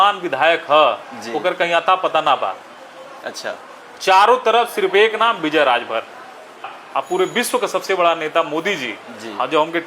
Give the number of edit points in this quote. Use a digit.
1